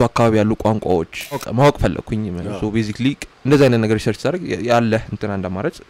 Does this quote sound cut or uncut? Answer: cut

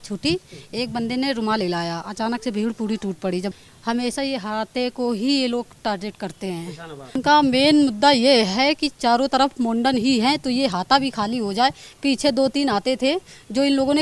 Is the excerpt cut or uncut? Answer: cut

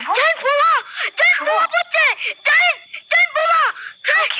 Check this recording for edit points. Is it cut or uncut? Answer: uncut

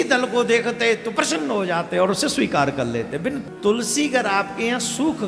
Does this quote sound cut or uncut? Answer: cut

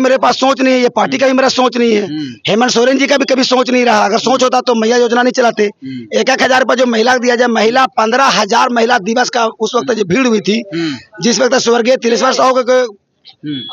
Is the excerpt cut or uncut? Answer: uncut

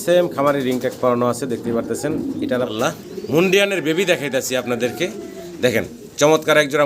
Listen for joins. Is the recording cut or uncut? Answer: cut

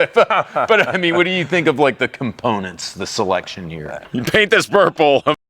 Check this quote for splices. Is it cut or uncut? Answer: cut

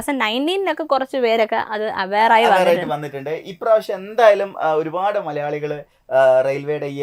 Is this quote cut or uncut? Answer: uncut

